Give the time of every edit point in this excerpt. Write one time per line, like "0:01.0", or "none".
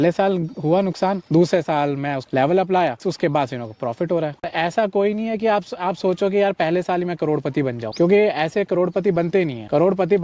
0:03.0
0:04.5

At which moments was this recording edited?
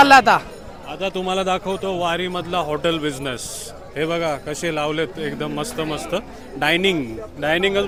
none

